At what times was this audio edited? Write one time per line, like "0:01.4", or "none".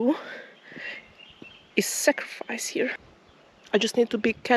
0:03.0